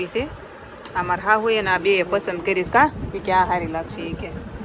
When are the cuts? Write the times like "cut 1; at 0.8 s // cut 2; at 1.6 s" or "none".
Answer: none